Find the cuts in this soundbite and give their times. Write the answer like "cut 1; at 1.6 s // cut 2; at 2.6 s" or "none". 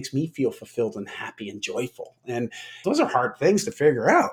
none